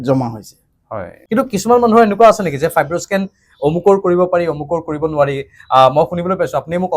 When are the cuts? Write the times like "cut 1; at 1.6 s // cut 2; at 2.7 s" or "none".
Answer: cut 1; at 1.1 s